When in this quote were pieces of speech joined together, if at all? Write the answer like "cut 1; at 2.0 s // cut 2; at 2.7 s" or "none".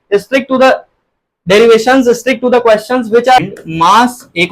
cut 1; at 3.4 s